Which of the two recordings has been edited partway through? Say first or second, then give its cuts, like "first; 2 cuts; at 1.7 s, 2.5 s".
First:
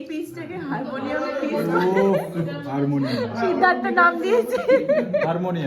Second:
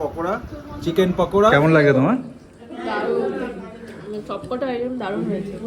second; 1 cut; at 1.6 s